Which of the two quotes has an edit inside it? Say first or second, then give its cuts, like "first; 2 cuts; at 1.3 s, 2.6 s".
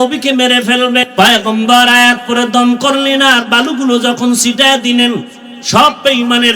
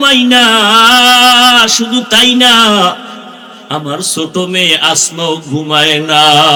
first; 1 cut; at 1.1 s